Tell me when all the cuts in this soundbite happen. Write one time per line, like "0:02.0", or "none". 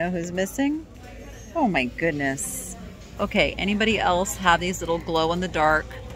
0:03.1